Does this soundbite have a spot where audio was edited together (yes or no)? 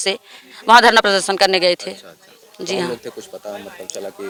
no